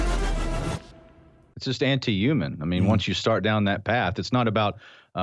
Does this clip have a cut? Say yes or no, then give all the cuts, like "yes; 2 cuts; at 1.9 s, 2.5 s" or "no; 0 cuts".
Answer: yes; 1 cut; at 1.5 s